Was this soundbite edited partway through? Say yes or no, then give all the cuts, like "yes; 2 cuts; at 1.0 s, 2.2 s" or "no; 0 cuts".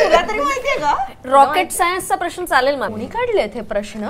yes; 1 cut; at 2.9 s